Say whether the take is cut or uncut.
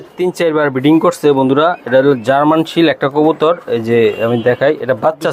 uncut